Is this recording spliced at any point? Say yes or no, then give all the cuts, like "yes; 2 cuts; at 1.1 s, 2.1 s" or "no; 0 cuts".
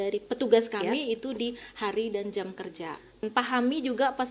yes; 1 cut; at 3.3 s